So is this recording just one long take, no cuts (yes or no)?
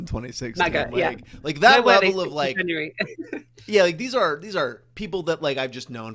yes